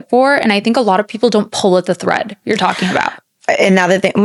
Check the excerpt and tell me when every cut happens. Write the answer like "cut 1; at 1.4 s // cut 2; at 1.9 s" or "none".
none